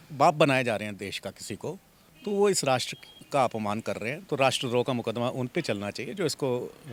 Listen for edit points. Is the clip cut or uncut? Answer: uncut